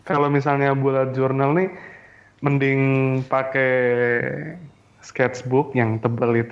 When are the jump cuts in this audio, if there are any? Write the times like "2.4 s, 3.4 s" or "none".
none